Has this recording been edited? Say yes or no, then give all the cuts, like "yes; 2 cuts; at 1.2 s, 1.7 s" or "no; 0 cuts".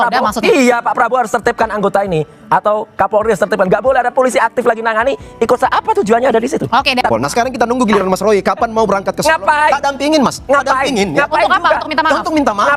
yes; 1 cut; at 7.1 s